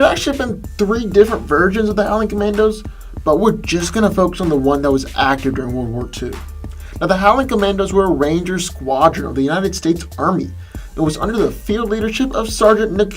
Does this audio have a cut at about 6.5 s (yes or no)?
no